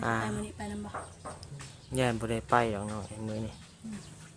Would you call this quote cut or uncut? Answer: uncut